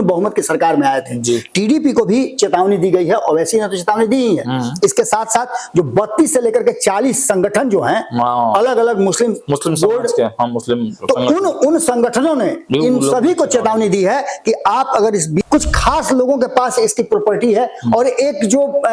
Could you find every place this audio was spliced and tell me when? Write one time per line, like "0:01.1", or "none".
0:15.4